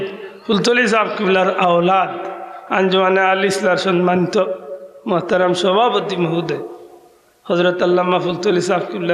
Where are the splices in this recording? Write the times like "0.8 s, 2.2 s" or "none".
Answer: none

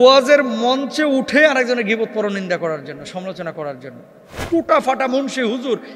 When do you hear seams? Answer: 4.3 s

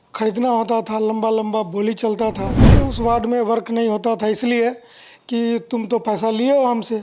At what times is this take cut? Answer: 2.7 s

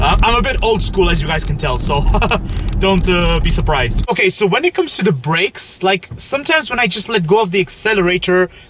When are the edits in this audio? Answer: none

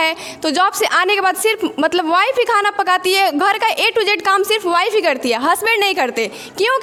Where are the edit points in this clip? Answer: none

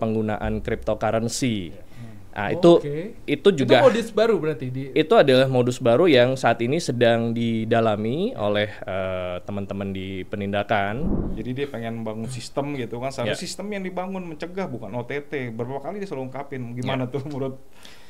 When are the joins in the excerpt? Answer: 11.3 s

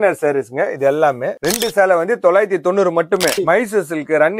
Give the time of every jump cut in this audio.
3.4 s

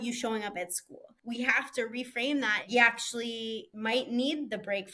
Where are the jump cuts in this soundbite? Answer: 1.1 s, 2.6 s, 3.7 s

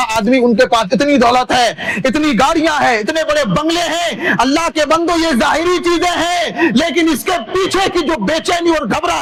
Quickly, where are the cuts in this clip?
none

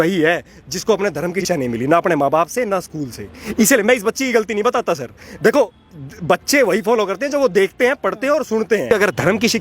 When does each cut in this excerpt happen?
1.4 s, 8.9 s

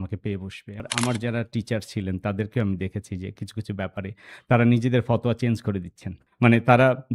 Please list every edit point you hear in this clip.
0.8 s, 6.2 s

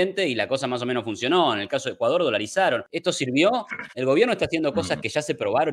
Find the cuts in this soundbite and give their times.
2.9 s

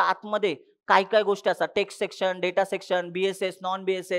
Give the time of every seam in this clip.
none

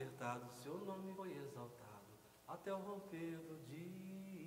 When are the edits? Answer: 1.2 s

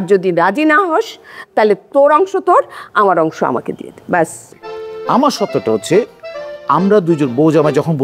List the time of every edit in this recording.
4.5 s

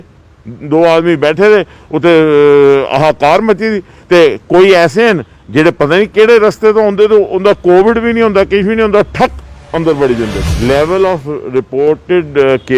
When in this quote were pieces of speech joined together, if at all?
10.4 s

